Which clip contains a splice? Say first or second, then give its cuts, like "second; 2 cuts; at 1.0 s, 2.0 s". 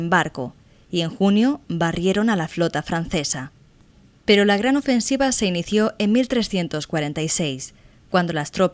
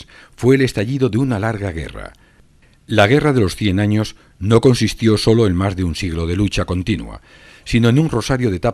second; 1 cut; at 1.4 s